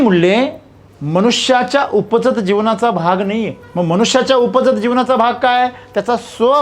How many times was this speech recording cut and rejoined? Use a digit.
1